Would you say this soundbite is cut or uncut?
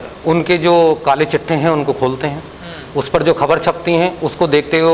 uncut